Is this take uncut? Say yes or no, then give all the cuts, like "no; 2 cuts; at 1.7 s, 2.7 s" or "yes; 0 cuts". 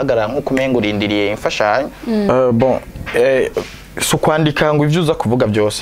no; 1 cut; at 2.3 s